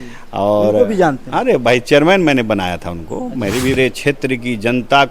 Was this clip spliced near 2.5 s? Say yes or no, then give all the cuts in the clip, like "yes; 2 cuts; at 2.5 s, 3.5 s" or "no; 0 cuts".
no; 1 cut; at 3.8 s